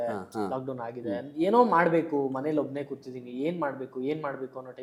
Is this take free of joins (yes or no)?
yes